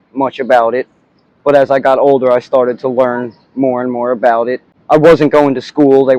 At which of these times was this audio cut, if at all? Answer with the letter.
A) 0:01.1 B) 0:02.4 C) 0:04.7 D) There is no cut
C